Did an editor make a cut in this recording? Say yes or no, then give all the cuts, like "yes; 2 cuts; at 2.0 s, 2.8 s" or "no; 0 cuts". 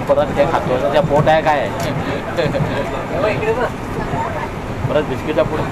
no; 0 cuts